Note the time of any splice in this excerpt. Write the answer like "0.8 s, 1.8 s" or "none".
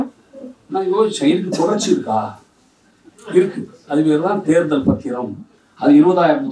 5.5 s